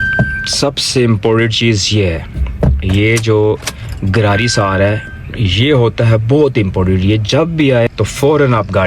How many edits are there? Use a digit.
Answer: 1